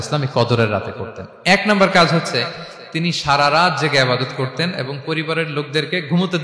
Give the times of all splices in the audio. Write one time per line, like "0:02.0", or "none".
none